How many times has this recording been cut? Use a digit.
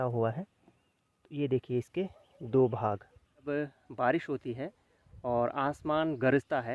1